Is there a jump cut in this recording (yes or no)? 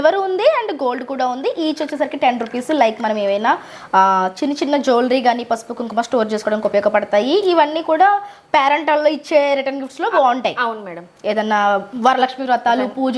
no